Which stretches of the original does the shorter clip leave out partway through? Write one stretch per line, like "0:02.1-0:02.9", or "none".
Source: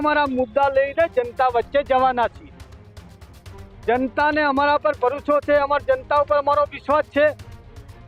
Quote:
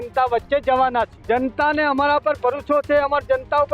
0:02.4-0:03.7